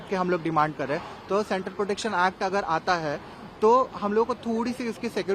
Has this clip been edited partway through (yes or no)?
no